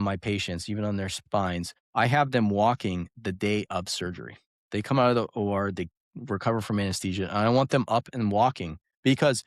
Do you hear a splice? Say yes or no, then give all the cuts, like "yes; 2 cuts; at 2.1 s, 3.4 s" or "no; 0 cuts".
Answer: yes; 1 cut; at 1.2 s